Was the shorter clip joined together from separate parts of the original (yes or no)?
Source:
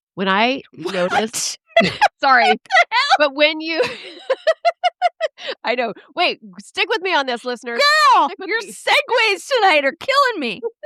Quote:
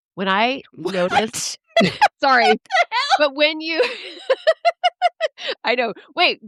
no